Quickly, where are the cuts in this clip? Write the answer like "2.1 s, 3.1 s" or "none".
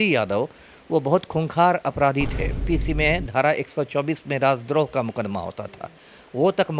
2.6 s